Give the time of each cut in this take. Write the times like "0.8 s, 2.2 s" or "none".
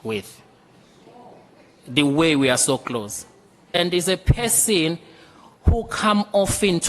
3.7 s